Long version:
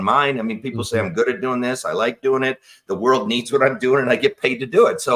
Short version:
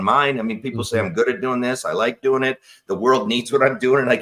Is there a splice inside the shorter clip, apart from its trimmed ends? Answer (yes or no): no